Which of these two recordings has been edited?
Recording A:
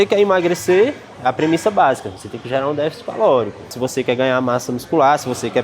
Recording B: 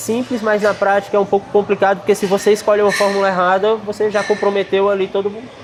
A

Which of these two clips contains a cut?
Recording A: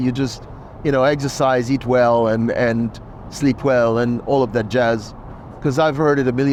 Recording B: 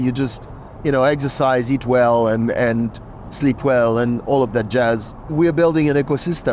B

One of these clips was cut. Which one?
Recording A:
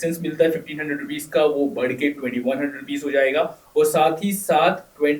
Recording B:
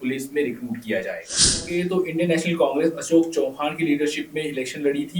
B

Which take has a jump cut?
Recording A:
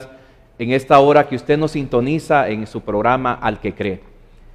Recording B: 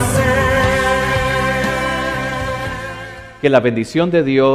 B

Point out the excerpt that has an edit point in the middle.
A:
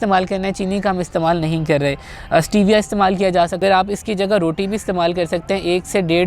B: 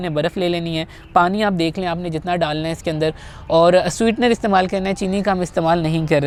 A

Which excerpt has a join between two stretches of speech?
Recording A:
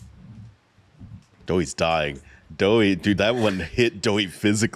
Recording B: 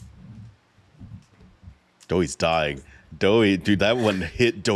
A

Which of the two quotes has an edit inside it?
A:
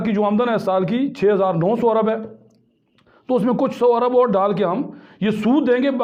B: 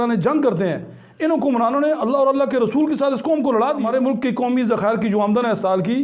B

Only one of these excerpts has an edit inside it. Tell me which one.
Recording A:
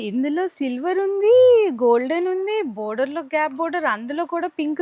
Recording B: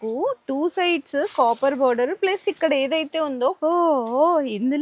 B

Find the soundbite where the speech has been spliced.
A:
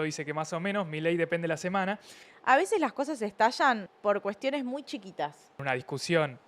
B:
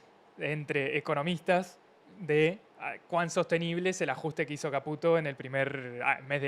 A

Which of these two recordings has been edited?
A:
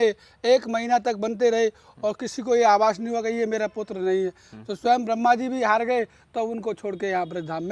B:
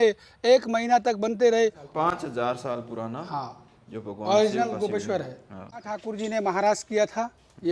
B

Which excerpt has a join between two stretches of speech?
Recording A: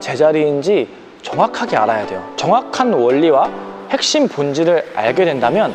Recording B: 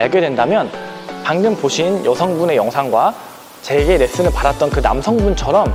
A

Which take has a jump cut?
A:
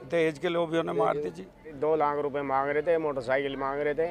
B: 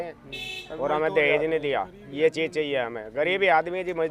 A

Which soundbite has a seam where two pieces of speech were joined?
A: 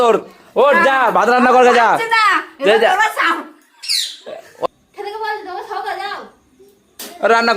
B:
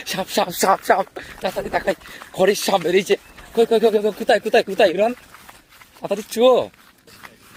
A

